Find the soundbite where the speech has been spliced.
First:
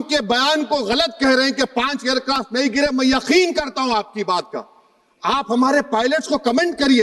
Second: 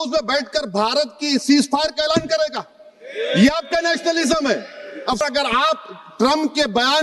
second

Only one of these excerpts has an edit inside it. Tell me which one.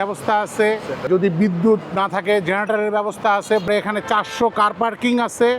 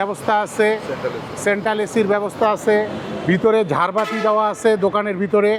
first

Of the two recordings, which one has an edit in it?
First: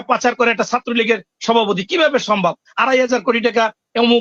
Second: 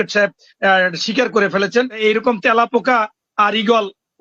second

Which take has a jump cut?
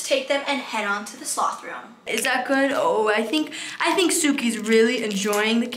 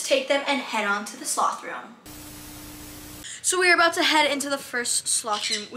first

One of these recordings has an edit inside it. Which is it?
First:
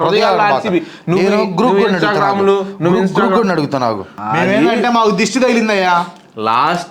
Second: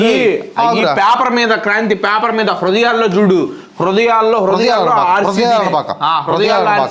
first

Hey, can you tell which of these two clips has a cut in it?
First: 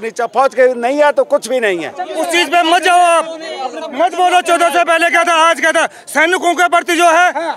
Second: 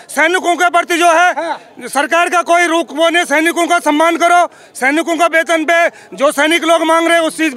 first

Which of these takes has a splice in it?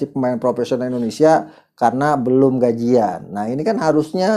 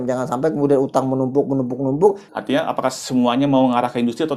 second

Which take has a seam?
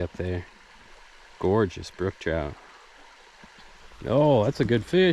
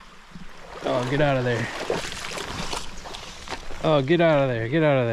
first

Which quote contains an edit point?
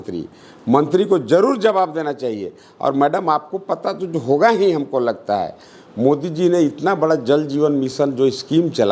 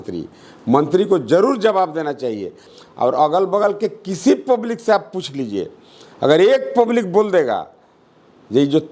second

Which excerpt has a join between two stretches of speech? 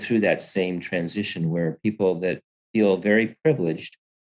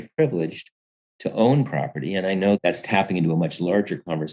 second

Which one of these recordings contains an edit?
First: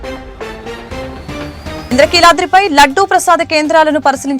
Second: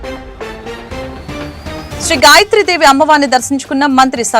first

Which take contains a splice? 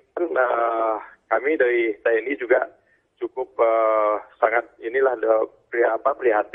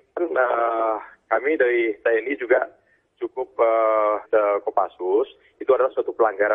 first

